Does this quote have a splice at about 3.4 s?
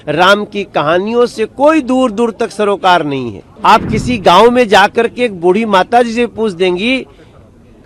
yes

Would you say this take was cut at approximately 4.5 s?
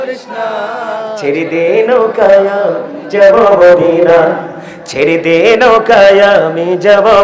no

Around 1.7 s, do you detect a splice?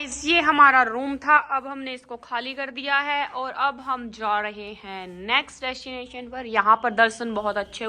no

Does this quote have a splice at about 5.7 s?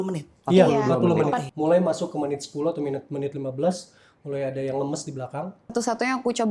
yes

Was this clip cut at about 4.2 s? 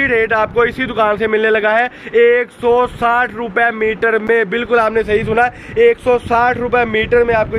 no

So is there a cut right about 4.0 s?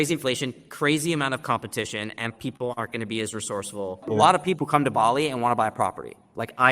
yes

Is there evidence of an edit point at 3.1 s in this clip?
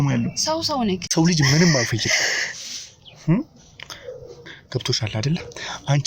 no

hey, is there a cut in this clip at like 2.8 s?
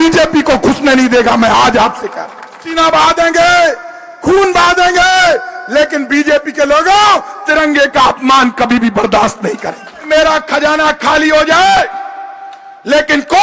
yes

